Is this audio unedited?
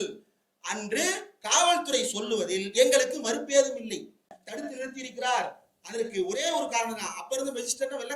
no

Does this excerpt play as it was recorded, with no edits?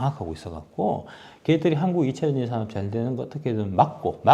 yes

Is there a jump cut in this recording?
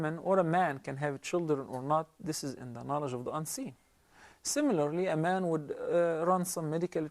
yes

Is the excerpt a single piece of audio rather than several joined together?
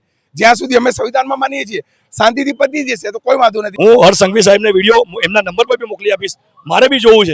no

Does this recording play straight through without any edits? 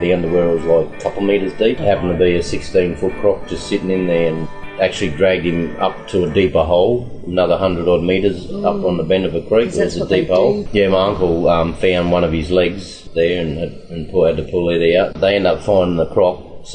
no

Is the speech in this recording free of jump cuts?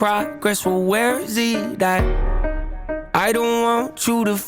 no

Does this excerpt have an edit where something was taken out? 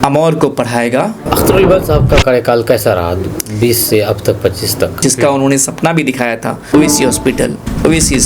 yes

